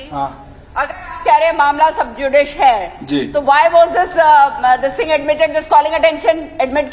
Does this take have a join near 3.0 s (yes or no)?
no